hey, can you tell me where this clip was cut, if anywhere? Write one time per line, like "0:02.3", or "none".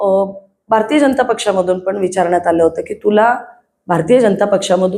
none